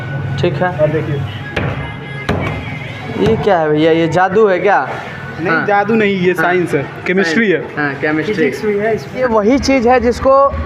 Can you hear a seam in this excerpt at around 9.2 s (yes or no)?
yes